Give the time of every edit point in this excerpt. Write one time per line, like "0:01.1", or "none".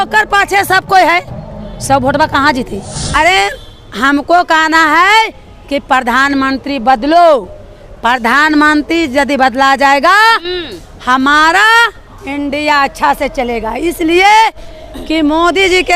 0:03.1